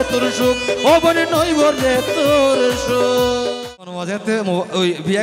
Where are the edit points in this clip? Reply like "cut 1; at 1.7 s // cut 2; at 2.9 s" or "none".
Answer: cut 1; at 4.0 s